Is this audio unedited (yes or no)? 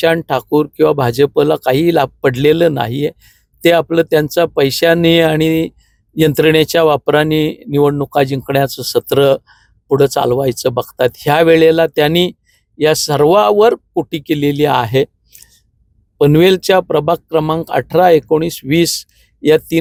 yes